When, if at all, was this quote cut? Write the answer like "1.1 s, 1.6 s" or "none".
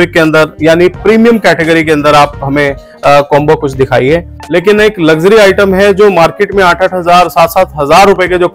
4.4 s